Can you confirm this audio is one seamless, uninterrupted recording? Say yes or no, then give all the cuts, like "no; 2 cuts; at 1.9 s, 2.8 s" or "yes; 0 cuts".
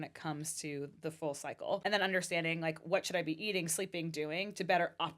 no; 1 cut; at 1.8 s